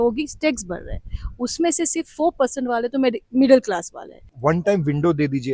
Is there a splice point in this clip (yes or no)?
yes